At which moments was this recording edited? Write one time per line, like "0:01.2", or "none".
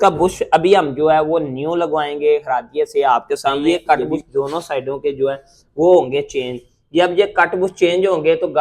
0:03.7